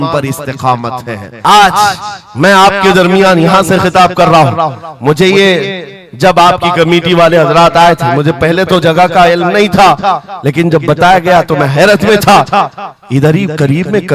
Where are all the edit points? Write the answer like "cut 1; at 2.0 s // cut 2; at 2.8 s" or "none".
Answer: cut 1; at 1.2 s